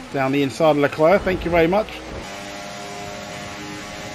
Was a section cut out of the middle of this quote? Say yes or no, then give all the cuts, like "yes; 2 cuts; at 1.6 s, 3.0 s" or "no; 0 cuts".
yes; 1 cut; at 2.2 s